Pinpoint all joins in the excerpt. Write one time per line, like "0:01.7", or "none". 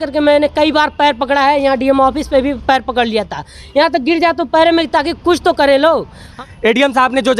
0:06.2